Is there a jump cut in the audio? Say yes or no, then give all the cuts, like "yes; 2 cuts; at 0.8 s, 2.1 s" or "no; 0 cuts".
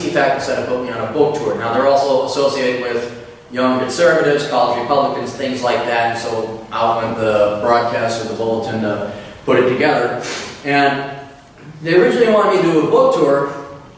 yes; 1 cut; at 6.1 s